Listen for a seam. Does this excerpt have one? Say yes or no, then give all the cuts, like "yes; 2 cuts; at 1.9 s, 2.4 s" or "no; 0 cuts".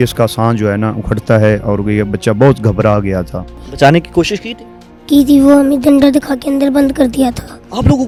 no; 0 cuts